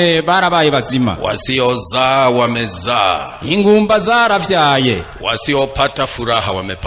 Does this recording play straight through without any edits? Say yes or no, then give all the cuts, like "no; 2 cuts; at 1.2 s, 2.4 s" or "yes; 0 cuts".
yes; 0 cuts